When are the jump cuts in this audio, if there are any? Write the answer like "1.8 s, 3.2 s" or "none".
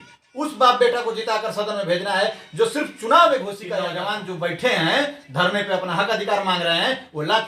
3.9 s